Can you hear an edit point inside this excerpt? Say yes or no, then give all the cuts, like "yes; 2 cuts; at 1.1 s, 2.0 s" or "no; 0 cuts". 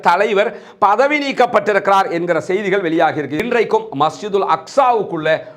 yes; 1 cut; at 3.4 s